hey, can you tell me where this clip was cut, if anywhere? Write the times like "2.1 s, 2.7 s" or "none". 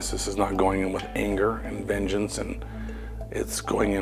none